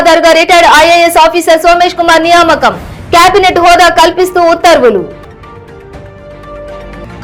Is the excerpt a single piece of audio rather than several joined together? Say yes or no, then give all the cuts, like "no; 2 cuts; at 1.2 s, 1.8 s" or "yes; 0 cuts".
yes; 0 cuts